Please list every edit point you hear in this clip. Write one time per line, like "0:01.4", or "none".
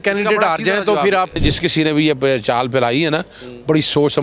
0:01.4